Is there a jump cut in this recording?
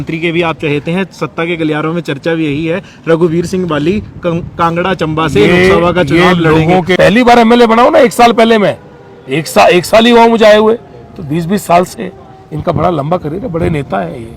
yes; 1 cut; at 7.0 s

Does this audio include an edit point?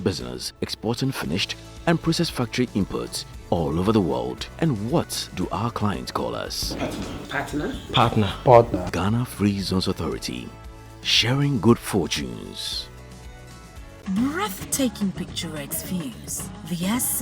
yes; 1 cut; at 14.0 s

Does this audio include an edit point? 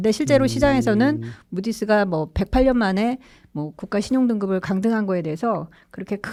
no; 0 cuts

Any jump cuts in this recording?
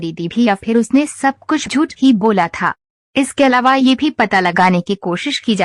yes; 1 cut; at 1.6 s

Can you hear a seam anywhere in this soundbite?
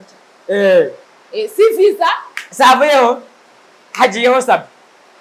no; 0 cuts

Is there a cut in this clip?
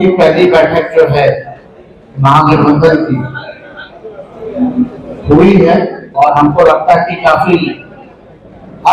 yes; 1 cut; at 6.0 s

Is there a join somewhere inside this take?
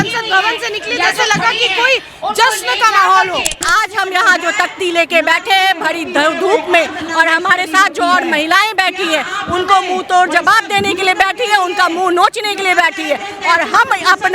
yes; 1 cut; at 3.6 s

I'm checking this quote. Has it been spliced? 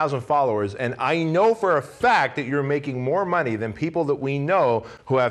no; 0 cuts

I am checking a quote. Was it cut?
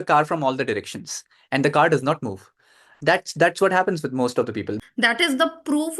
yes; 1 cut; at 4.7 s

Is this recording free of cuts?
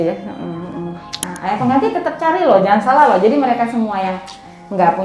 no; 1 cut; at 1.2 s

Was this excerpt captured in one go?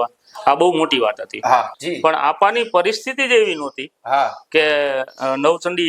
no; 1 cut; at 1.7 s

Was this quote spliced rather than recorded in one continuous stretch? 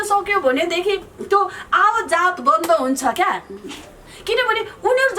no; 0 cuts

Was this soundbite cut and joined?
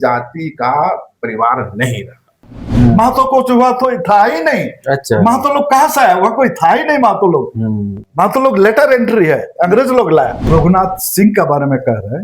yes; 2 cuts; at 2.7 s, 10.5 s

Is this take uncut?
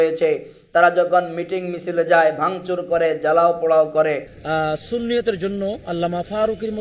no; 1 cut; at 4.3 s

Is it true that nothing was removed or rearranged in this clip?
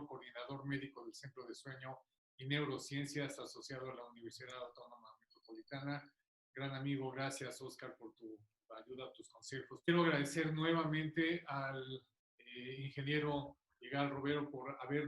no; 1 cut; at 9.9 s

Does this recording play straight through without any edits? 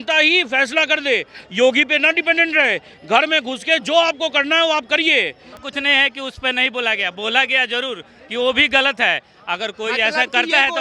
no; 1 cut; at 5.5 s

